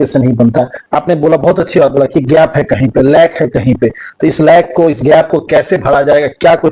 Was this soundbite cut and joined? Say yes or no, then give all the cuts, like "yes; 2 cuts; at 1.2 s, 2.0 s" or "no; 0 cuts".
no; 0 cuts